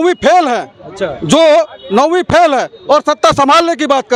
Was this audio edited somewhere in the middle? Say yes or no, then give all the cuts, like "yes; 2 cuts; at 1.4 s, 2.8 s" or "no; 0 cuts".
no; 0 cuts